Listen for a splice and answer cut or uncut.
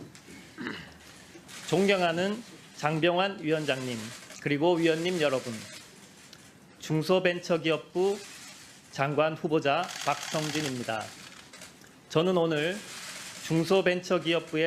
cut